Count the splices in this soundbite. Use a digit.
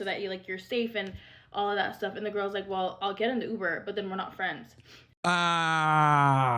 0